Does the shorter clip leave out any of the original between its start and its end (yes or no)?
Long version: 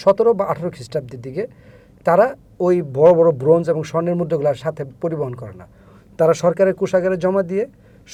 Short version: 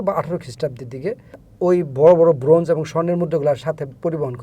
yes